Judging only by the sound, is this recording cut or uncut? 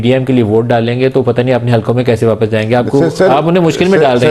uncut